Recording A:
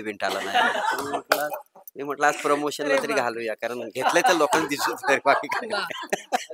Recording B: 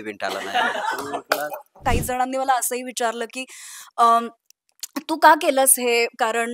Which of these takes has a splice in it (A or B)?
B